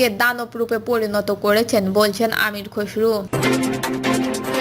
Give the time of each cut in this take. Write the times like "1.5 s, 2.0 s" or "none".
3.3 s